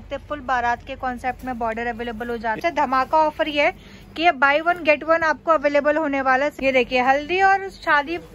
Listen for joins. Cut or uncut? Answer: cut